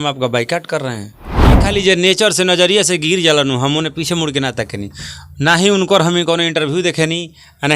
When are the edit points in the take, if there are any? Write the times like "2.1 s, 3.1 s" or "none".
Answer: 1.7 s